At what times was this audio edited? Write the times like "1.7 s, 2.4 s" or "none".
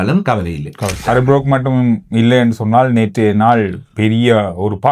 1.0 s